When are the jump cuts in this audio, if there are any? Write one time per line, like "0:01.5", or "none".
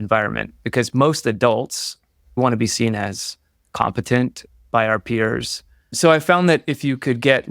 0:02.4
0:05.8